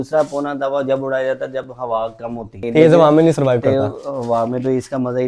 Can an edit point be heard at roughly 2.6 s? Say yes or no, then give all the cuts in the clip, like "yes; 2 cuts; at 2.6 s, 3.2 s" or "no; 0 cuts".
yes; 1 cut; at 2.6 s